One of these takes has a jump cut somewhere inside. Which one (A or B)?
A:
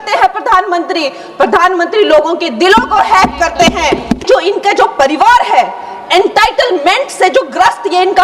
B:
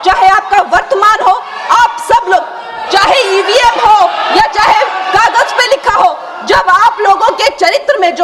A